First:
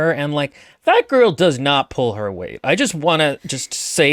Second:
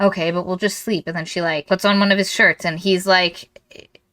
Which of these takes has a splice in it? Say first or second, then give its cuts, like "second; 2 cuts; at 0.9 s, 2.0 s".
second; 1 cut; at 1.6 s